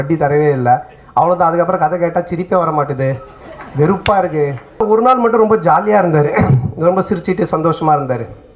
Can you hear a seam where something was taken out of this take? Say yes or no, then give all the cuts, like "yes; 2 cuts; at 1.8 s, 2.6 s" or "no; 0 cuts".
yes; 1 cut; at 4.8 s